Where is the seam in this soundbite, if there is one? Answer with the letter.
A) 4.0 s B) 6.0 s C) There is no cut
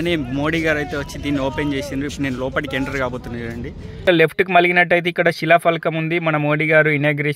A